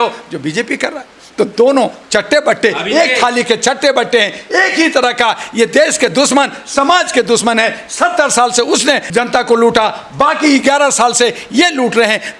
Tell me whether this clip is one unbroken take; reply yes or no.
no